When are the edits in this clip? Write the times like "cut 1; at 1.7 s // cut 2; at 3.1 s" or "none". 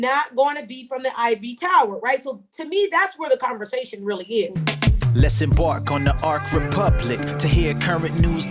cut 1; at 4.5 s